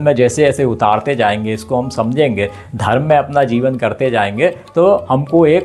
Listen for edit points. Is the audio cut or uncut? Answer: uncut